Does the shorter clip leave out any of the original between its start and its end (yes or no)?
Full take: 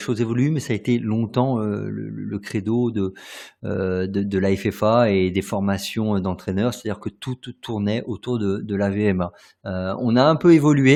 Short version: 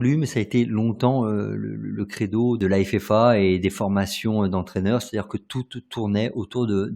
yes